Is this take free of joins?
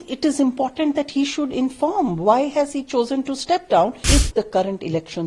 no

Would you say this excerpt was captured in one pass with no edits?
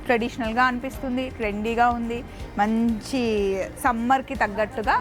yes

